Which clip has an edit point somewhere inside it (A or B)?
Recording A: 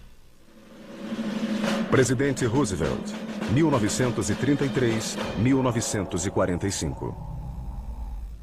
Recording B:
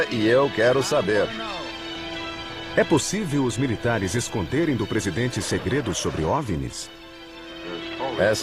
A